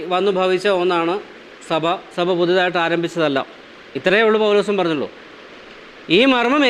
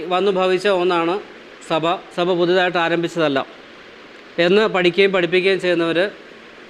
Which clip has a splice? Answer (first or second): first